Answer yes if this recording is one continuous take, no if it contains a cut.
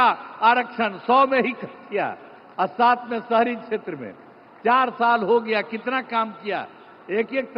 yes